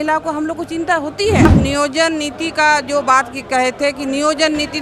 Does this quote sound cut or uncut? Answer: cut